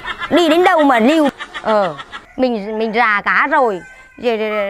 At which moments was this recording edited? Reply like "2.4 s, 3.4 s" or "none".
1.3 s